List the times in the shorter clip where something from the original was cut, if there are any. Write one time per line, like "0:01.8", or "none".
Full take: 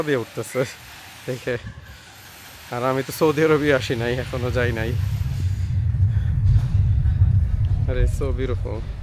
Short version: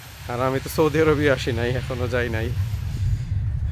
0:02.5